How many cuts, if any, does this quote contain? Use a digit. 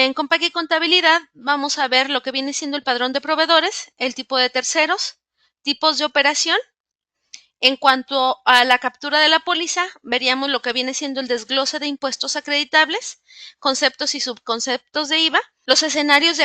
1